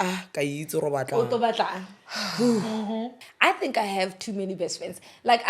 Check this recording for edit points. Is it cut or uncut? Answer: cut